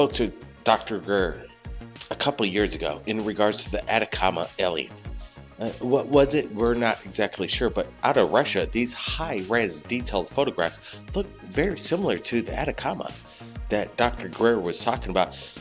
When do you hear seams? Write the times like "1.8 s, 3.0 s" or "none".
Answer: 4.5 s